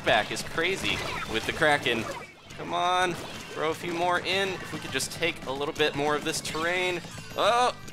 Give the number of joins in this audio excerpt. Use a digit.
1